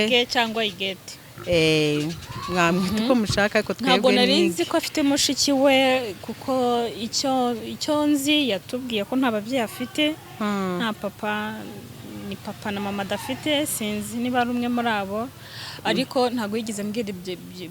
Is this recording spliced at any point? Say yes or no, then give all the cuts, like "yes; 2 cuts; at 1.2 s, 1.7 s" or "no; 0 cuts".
no; 0 cuts